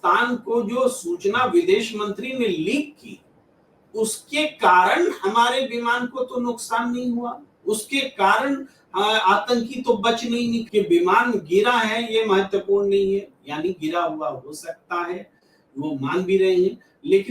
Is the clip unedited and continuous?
no; 1 cut; at 10.7 s

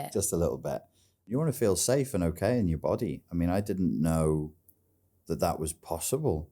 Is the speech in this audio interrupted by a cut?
yes; 1 cut; at 1.3 s

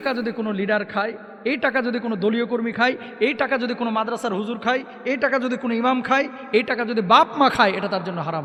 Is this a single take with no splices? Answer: yes; 0 cuts

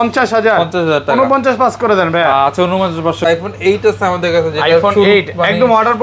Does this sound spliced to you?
yes; 1 cut; at 3.3 s

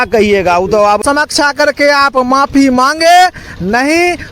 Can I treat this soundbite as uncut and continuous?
no; 1 cut; at 1.0 s

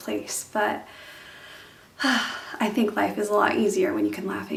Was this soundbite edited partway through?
no; 0 cuts

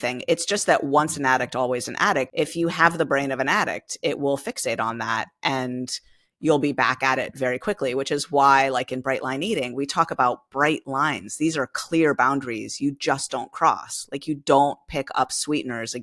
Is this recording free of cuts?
no; 1 cut; at 2.3 s

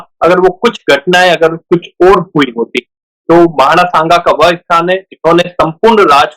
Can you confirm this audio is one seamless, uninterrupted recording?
yes; 0 cuts

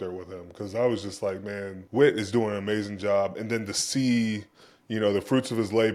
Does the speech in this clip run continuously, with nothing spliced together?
no; 1 cut; at 1.8 s

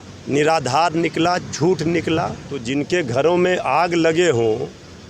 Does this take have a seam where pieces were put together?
yes; 1 cut; at 2.5 s

